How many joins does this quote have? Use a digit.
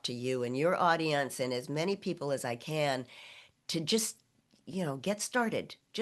0